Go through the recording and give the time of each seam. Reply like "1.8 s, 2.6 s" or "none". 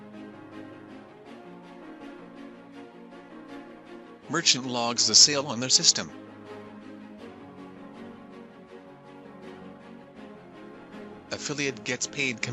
none